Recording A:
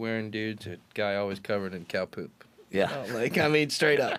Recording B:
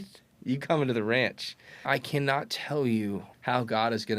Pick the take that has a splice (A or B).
B